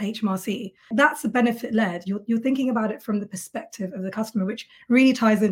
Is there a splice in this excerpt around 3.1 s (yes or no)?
no